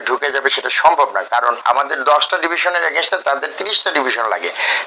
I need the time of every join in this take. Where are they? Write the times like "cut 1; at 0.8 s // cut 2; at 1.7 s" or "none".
cut 1; at 1.6 s